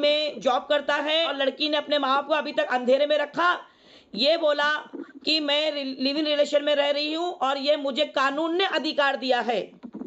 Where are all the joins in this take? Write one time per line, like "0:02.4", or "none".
0:01.3